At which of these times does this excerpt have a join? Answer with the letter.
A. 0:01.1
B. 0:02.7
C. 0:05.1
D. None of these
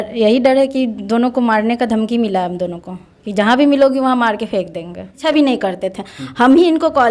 C